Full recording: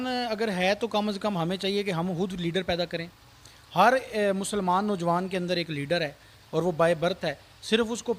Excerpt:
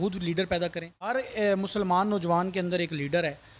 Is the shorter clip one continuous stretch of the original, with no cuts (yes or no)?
no